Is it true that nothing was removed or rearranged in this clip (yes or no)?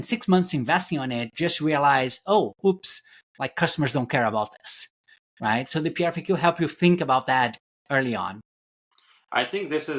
yes